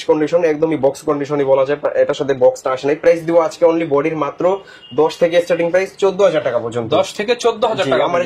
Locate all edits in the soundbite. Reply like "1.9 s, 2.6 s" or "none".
none